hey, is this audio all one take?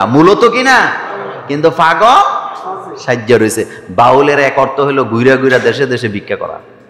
yes; 0 cuts

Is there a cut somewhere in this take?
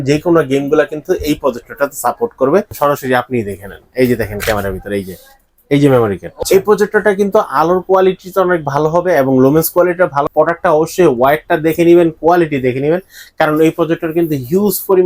yes; 3 cuts; at 2.7 s, 6.3 s, 10.3 s

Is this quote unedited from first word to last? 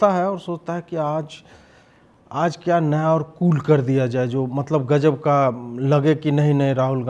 yes; 0 cuts

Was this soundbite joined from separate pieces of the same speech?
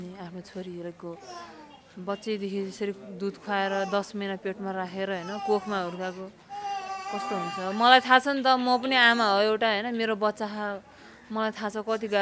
no; 0 cuts

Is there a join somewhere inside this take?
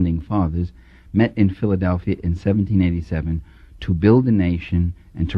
no; 0 cuts

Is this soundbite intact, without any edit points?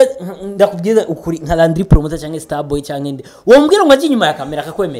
yes; 0 cuts

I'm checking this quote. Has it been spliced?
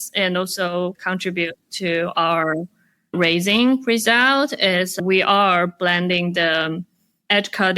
yes; 1 cut; at 1.0 s

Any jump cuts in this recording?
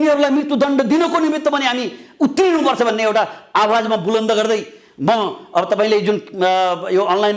no; 0 cuts

